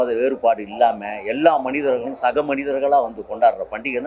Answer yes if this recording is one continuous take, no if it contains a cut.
yes